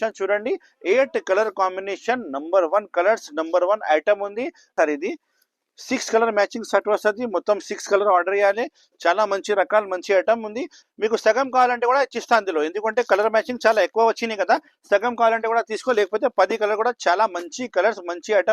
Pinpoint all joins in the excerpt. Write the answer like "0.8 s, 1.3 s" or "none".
4.6 s, 10.8 s